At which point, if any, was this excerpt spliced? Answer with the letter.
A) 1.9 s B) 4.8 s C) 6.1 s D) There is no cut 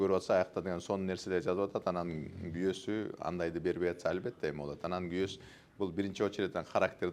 D